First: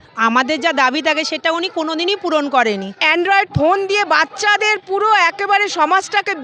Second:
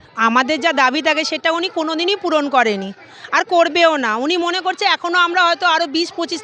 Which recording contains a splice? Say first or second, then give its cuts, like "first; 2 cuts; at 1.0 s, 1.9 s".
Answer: first; 1 cut; at 3.0 s